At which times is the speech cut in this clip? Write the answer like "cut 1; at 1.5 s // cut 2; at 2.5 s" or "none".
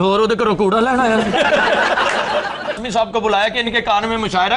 cut 1; at 2.8 s